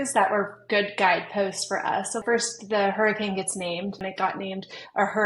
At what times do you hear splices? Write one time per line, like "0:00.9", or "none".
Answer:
0:02.2
0:04.0